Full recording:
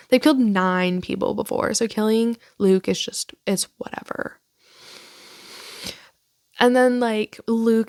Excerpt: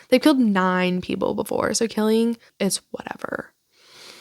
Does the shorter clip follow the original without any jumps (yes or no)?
no